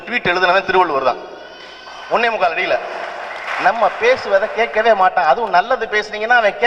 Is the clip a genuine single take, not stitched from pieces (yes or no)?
no